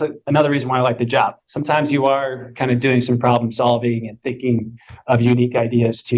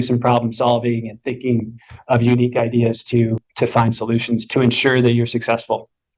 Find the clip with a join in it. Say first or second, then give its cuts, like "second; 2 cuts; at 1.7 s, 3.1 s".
second; 1 cut; at 4.4 s